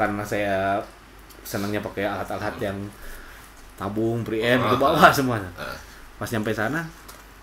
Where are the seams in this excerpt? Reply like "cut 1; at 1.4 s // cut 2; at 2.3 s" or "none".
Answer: none